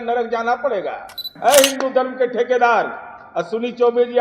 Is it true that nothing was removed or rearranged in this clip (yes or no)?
no